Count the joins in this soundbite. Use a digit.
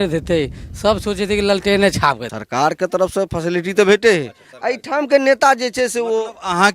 1